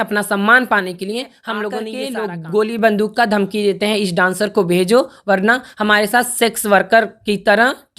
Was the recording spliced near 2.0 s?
yes; 1 cut; at 2.0 s

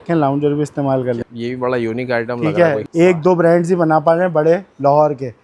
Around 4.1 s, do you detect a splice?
no; 2 cuts; at 1.3 s, 2.8 s

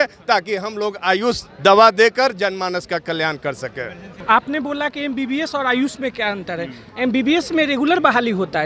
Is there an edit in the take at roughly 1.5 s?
no; 1 cut; at 4.1 s

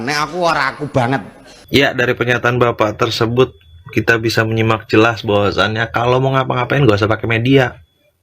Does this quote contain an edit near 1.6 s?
yes; 1 cut; at 1.6 s

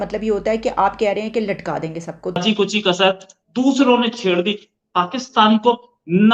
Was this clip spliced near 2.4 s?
yes; 1 cut; at 2.4 s

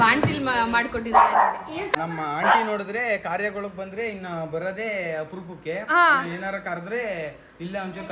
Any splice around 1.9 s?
yes; 1 cut; at 1.9 s

